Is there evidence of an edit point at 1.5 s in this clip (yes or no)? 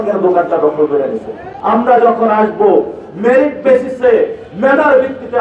yes